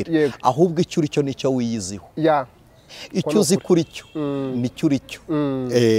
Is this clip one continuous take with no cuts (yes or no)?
yes